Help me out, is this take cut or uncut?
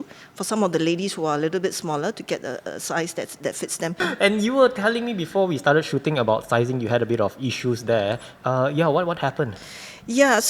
cut